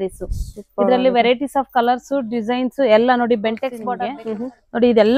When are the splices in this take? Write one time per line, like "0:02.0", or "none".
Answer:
0:03.8